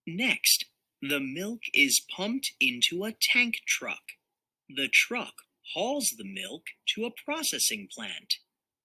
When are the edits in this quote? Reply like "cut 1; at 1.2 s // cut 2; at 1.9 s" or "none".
cut 1; at 0.9 s